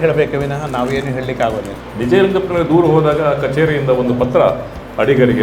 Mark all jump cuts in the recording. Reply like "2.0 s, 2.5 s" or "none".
1.7 s